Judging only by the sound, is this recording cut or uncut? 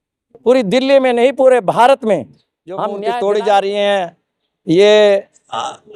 cut